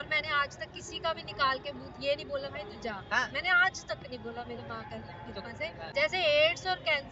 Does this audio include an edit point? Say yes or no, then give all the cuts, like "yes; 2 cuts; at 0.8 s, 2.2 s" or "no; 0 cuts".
yes; 1 cut; at 5.9 s